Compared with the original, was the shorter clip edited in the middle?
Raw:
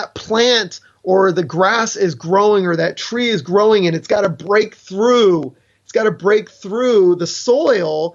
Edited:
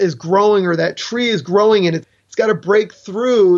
yes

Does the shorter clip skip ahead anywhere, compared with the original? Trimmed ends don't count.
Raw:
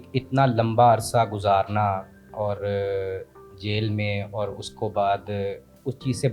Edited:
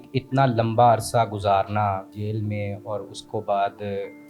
yes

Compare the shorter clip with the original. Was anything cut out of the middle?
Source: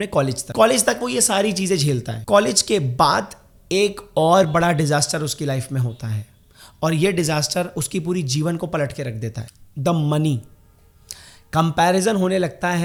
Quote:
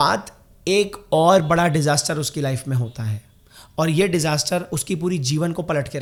no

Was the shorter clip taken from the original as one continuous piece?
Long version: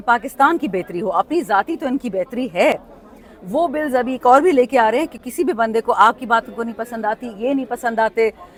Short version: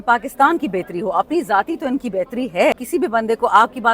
no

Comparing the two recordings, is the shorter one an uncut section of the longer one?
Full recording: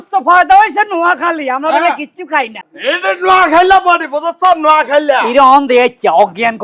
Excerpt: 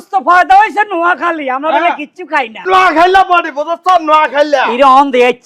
no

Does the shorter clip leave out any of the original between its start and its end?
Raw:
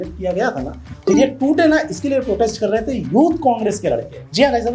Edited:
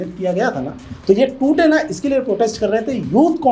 no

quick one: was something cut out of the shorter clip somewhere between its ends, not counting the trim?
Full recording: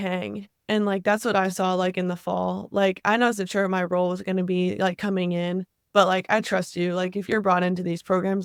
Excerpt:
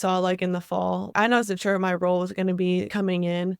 yes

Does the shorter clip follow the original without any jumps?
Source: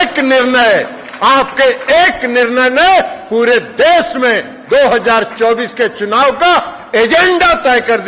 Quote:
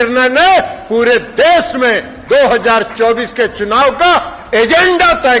yes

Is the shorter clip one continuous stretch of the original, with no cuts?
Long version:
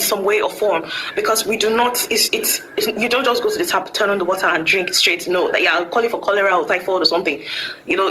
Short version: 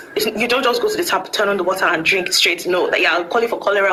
yes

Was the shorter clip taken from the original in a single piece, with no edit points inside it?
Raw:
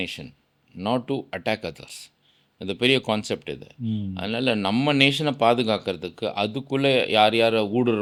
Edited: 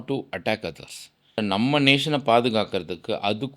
no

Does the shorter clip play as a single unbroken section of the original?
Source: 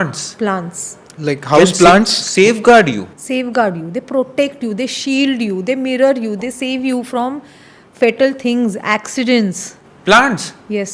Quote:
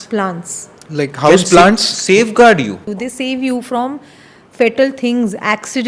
no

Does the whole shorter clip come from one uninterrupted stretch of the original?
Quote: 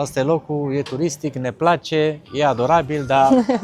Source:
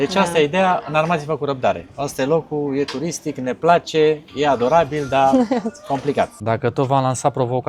yes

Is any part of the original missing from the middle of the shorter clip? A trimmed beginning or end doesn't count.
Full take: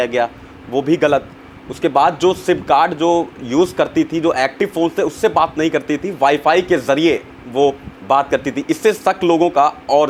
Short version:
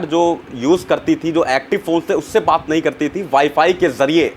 no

